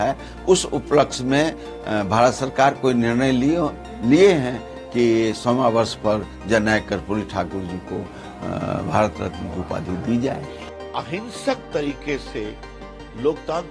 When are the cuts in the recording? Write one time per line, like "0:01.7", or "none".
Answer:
0:10.5